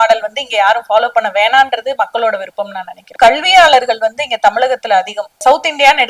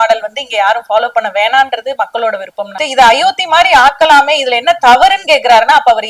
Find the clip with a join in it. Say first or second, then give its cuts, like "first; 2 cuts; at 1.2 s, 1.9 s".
second; 1 cut; at 2.8 s